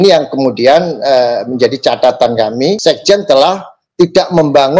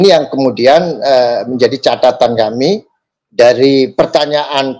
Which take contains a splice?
first; 1 cut; at 2.8 s

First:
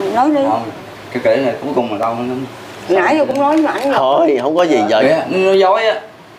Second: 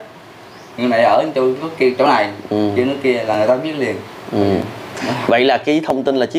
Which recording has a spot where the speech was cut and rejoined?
first; 1 cut; at 5.0 s

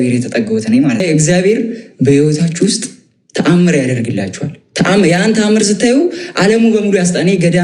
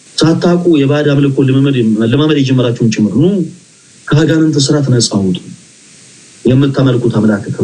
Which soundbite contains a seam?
first; 1 cut; at 1.0 s

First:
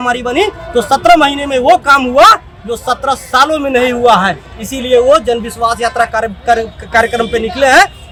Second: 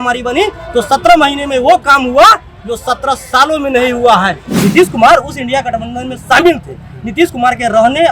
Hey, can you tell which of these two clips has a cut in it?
second; 1 cut; at 4.5 s

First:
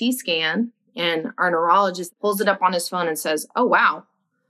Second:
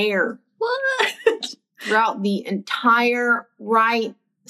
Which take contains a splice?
first; 1 cut; at 2.1 s

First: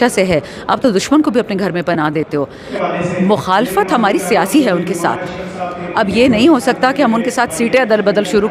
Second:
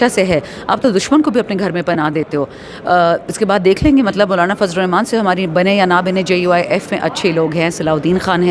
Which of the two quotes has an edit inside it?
first; 1 cut; at 2.8 s

